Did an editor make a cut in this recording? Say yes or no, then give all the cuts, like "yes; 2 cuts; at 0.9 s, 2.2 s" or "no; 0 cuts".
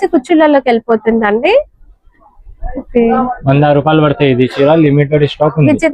no; 0 cuts